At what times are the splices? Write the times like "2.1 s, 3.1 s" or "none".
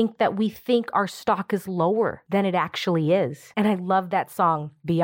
2.2 s, 3.4 s